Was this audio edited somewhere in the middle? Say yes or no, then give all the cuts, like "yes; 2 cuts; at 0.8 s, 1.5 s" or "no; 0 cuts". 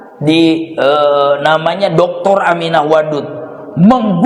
no; 0 cuts